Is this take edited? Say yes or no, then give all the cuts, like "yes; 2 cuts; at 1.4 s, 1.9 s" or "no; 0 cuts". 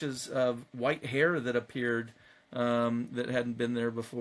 no; 0 cuts